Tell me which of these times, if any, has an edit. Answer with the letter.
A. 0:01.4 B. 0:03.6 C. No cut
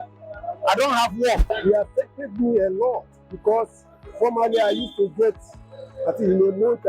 A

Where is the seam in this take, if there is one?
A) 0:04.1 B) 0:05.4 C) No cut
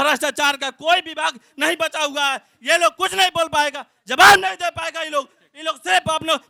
C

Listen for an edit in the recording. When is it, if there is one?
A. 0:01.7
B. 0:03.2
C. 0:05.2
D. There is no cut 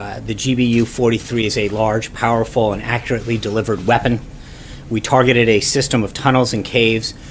C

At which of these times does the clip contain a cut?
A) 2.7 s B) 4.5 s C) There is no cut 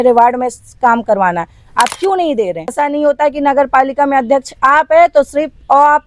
A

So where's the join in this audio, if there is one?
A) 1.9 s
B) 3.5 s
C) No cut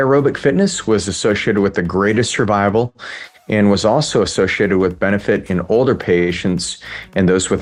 C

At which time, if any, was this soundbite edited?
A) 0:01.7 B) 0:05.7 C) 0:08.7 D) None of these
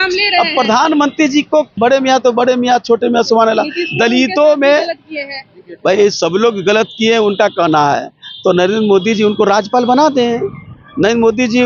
A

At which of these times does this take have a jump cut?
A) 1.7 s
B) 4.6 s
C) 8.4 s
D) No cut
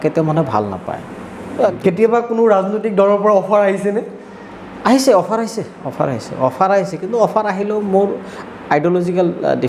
A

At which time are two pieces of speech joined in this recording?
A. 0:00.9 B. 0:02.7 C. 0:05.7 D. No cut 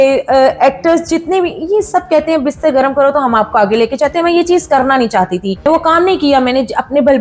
C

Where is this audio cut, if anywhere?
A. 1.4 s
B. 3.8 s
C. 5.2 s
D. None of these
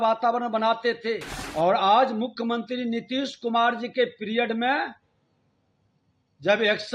A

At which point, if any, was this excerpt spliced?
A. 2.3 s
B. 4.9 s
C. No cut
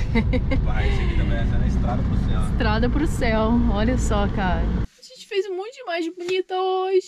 B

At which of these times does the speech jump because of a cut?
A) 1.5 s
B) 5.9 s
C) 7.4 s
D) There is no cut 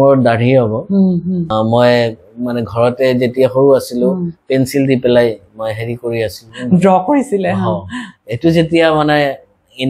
A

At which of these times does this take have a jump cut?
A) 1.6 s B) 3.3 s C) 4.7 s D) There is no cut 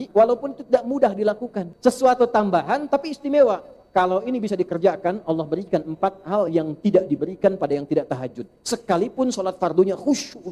A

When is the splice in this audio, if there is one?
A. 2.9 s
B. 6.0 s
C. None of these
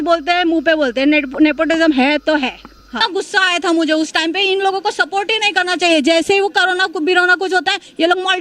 A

